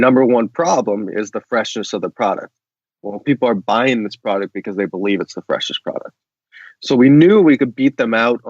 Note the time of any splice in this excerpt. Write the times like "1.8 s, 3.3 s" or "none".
none

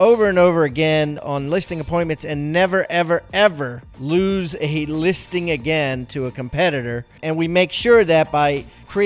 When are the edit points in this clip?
none

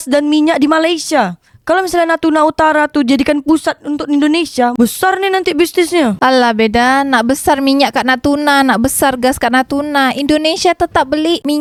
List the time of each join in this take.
none

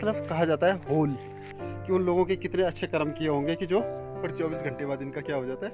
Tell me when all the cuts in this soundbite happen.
1.6 s, 4.0 s

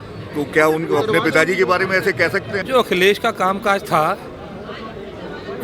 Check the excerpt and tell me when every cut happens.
2.6 s

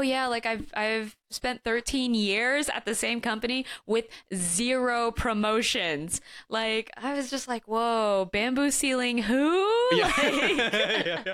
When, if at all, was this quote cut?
none

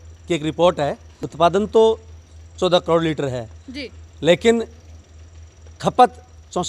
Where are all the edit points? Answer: 1.2 s

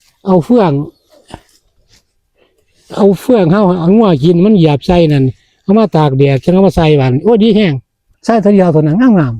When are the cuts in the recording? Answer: 8.1 s

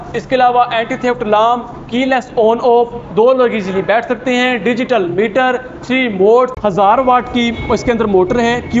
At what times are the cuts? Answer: 6.6 s

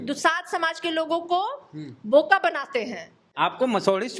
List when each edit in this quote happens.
3.3 s

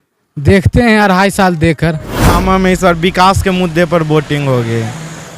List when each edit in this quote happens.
2.3 s

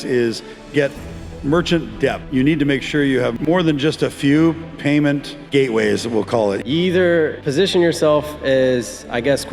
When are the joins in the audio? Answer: 2.2 s, 3.3 s, 5.3 s, 6.6 s, 7.4 s

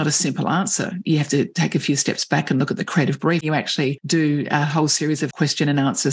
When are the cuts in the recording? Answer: 3.4 s, 5.3 s

